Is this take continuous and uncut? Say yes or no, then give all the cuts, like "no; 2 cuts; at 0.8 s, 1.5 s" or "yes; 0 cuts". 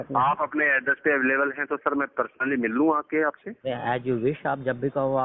yes; 0 cuts